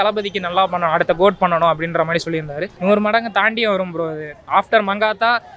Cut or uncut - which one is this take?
cut